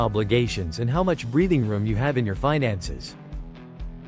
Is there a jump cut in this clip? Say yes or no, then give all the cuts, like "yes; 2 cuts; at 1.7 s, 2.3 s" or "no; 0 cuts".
yes; 1 cut; at 3.1 s